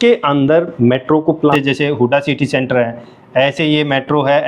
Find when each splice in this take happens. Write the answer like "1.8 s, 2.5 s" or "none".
1.5 s